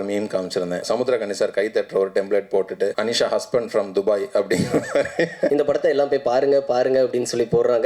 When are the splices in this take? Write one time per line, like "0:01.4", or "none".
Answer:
0:00.9
0:03.0
0:05.5